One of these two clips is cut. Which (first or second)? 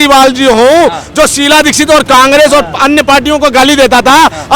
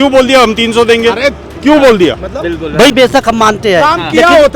second